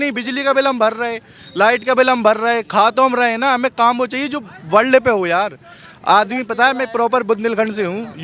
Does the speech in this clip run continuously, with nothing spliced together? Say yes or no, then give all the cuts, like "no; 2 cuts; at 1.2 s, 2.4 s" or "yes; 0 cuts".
yes; 0 cuts